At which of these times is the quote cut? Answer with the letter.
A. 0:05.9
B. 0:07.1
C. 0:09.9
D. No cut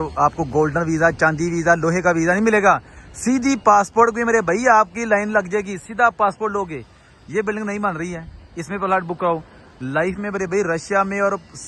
D